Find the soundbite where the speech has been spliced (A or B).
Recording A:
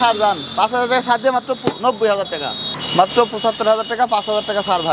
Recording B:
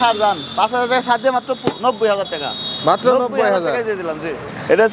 A